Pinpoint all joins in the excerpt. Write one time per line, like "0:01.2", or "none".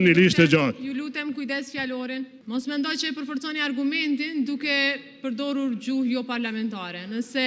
0:02.4